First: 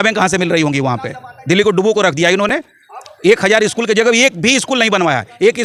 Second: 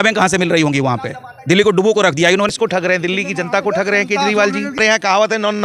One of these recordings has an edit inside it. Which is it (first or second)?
second